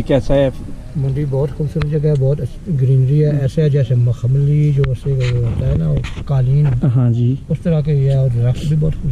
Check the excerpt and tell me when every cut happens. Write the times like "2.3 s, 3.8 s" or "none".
none